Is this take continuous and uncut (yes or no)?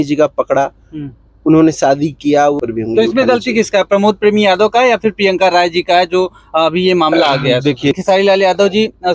no